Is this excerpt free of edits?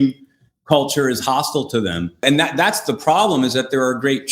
no; 1 cut; at 2.2 s

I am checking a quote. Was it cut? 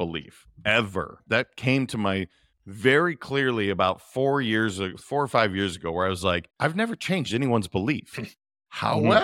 yes; 2 cuts; at 1.2 s, 6.5 s

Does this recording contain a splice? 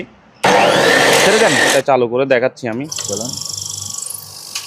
yes; 1 cut; at 1.7 s

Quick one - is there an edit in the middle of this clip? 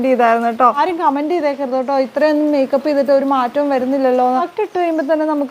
yes; 2 cuts; at 0.7 s, 4.4 s

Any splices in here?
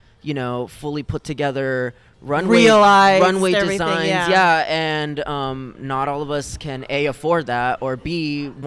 no; 0 cuts

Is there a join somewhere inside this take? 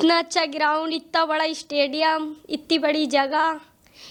no; 0 cuts

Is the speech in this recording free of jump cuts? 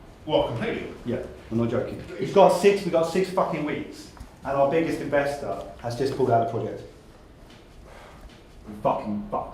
no; 3 cuts; at 0.9 s, 2.0 s, 8.6 s

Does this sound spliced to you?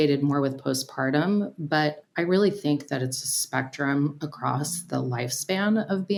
no; 0 cuts

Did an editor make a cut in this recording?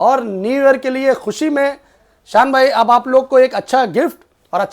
no; 0 cuts

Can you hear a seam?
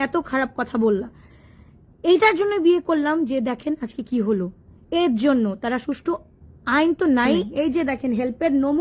yes; 1 cut; at 7.5 s

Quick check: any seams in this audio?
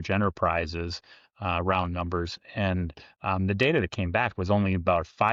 no; 0 cuts

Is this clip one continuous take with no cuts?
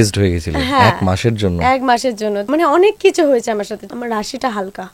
no; 2 cuts; at 2.5 s, 3.8 s

